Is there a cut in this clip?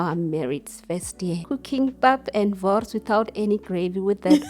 yes; 1 cut; at 1.5 s

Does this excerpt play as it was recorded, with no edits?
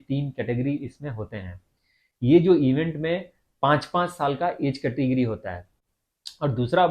no; 1 cut; at 5.7 s

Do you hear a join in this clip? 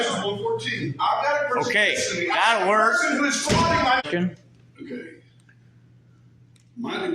yes; 1 cut; at 4.0 s

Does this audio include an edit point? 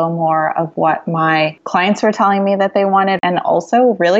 yes; 1 cut; at 3.2 s

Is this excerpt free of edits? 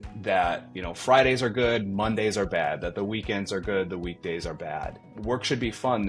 no; 1 cut; at 5.1 s

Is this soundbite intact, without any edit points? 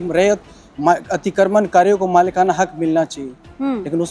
yes; 0 cuts

